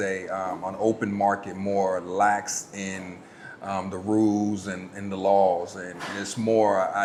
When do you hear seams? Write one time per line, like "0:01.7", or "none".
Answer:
none

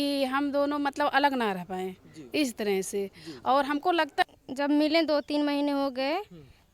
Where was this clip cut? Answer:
0:04.2

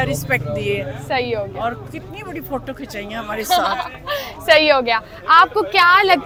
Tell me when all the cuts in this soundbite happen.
none

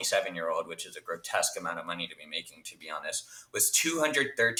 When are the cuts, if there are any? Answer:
none

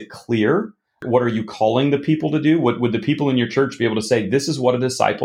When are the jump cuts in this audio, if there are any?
0:01.0

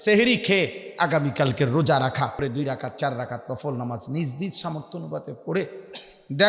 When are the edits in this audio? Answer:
0:02.4

